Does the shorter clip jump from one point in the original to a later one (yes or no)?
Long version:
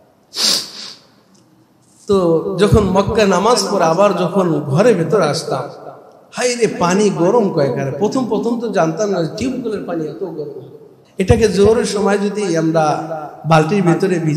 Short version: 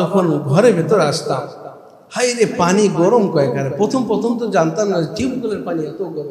no